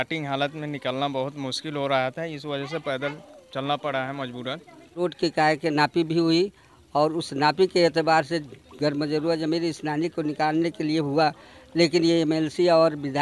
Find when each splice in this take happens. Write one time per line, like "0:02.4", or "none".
0:05.0